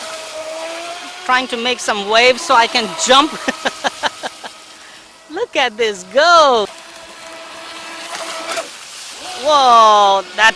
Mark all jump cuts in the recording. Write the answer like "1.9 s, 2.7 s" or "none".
6.7 s